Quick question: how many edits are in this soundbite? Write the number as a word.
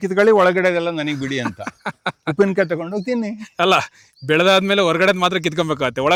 zero